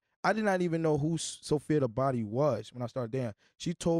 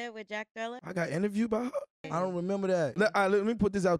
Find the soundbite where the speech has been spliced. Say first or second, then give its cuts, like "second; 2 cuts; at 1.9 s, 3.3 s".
second; 3 cuts; at 0.8 s, 2.1 s, 2.9 s